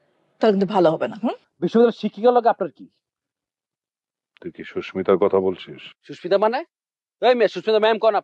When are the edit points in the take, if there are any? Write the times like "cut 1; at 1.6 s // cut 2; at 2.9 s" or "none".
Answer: cut 1; at 1.5 s